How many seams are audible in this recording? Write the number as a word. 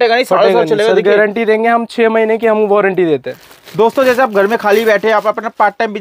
one